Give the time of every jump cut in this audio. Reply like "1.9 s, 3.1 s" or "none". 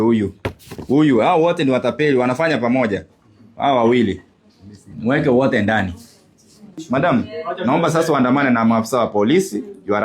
7.0 s